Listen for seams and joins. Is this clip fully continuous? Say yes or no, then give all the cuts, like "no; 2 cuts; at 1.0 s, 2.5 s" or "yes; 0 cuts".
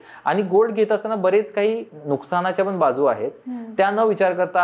yes; 0 cuts